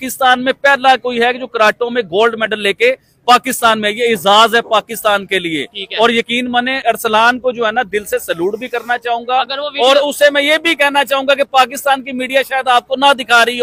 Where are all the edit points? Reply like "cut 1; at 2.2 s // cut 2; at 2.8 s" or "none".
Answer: none

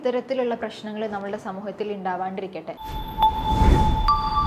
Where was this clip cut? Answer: cut 1; at 2.7 s

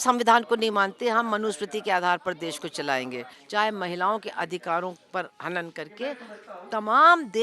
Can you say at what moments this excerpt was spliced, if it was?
cut 1; at 3.4 s

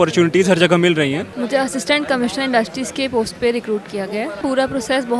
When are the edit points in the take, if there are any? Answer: cut 1; at 1.2 s // cut 2; at 4.4 s

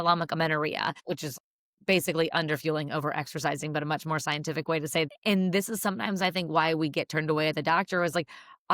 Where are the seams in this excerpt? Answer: cut 1; at 1.2 s // cut 2; at 5.1 s

